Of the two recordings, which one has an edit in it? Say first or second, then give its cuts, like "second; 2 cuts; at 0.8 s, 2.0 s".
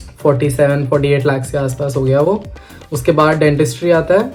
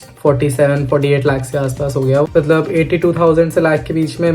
second; 1 cut; at 2.3 s